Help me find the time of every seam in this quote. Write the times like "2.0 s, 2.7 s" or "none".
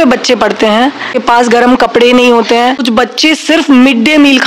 1.2 s, 2.9 s